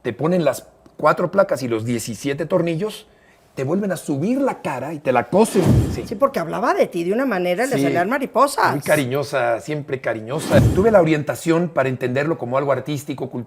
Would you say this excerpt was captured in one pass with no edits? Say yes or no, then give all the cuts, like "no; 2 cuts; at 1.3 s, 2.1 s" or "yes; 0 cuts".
no; 2 cuts; at 5.7 s, 10.6 s